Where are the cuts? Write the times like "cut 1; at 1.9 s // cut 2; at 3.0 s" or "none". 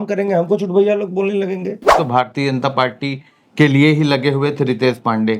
cut 1; at 1.9 s